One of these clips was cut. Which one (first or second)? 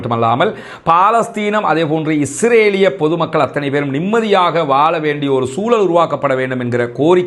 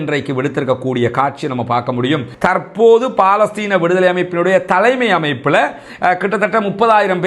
second